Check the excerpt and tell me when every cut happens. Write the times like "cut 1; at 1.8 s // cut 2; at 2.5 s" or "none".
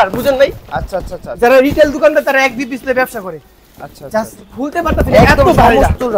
none